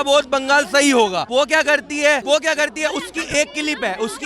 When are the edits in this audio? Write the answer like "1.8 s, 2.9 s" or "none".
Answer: 1.2 s, 2.2 s